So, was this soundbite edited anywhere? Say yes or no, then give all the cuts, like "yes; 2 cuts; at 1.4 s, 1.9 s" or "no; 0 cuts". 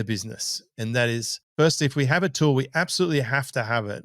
yes; 1 cut; at 1.4 s